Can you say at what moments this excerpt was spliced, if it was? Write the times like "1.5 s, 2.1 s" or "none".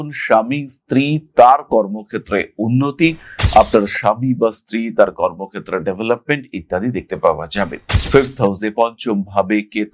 7.9 s